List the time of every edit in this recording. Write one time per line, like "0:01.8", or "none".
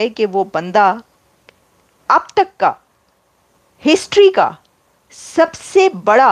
none